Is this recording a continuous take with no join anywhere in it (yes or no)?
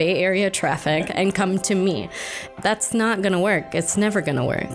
no